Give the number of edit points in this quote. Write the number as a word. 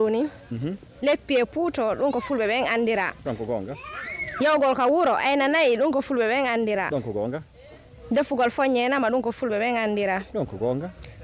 zero